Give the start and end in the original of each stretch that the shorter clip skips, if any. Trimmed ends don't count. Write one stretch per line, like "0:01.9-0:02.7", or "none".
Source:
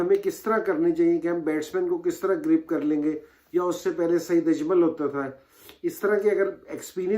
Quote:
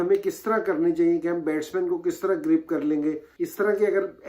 0:03.3-0:05.8